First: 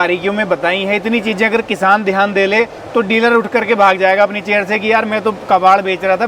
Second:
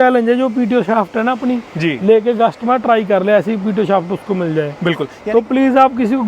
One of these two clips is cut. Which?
second; 1 cut; at 5.1 s

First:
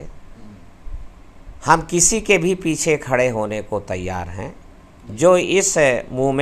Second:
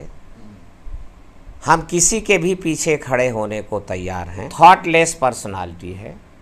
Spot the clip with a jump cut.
second; 1 cut; at 4.5 s

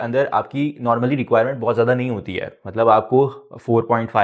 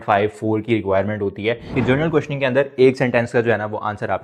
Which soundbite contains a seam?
second; 1 cut; at 1.7 s

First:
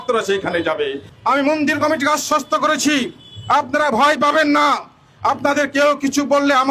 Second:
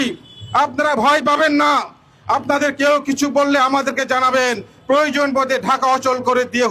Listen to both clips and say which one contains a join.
first; 1 cut; at 1.1 s

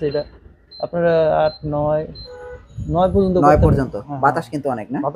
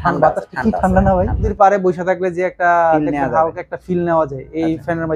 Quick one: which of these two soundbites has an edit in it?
second; 1 cut; at 1.5 s

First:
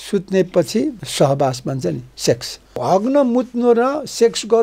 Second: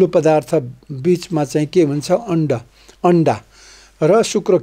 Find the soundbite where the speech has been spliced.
first; 2 cuts; at 1.0 s, 2.8 s

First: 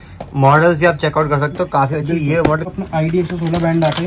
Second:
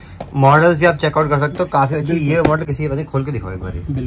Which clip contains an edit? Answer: first; 1 cut; at 2.7 s

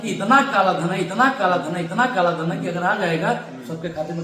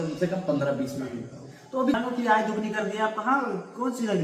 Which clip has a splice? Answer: second; 1 cut; at 2.0 s

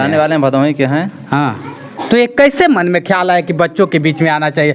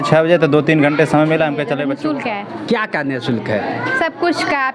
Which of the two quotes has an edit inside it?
second; 1 cut; at 1.9 s

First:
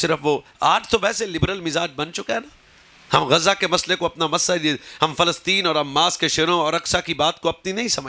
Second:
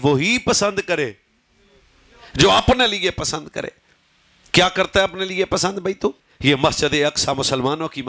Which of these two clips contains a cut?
second; 1 cut; at 6.3 s

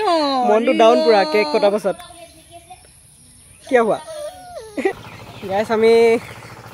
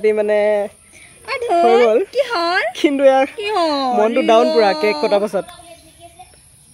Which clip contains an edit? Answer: first; 1 cut; at 4.9 s

